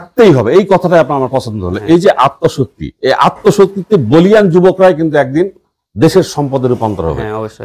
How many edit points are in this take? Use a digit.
0